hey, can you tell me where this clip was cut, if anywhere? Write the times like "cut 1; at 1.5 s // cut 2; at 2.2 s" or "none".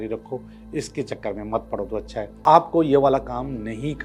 cut 1; at 2.4 s

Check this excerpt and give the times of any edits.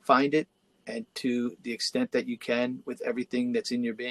none

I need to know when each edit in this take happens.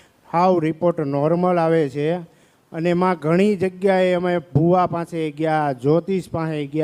none

